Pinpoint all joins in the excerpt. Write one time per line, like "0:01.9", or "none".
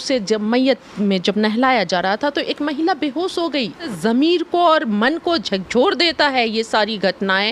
0:03.9